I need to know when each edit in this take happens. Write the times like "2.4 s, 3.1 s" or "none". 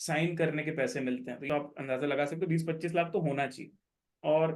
1.5 s